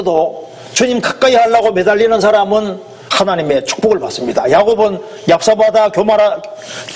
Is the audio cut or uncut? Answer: uncut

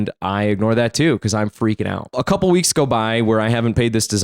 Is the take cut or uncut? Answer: cut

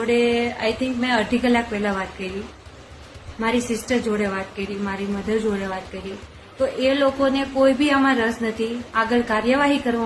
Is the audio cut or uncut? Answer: uncut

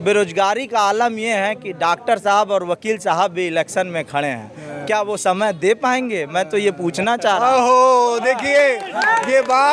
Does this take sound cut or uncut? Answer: uncut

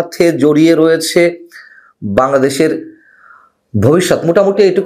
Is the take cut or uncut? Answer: uncut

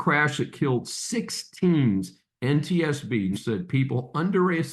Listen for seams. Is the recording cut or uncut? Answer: cut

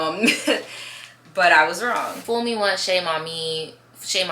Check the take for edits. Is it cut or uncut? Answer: cut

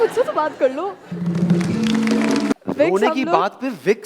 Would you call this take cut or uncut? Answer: cut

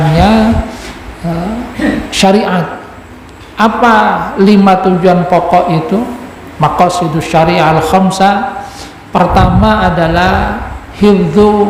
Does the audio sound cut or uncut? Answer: uncut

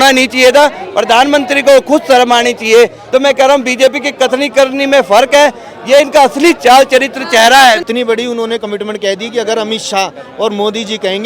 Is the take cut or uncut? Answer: cut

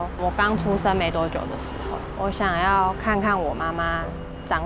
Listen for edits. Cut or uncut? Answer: cut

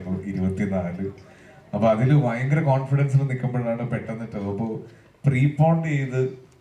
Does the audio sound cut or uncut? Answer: uncut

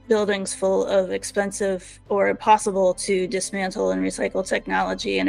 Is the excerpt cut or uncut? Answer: uncut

